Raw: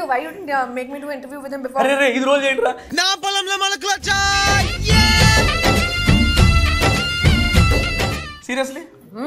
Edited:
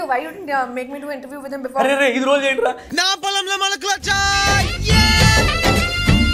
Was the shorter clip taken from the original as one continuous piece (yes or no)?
yes